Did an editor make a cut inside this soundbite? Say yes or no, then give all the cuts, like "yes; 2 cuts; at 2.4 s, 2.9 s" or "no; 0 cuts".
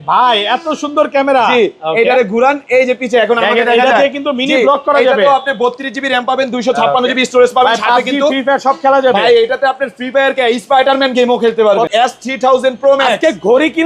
yes; 1 cut; at 11.9 s